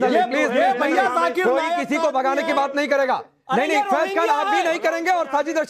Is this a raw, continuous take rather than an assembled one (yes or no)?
yes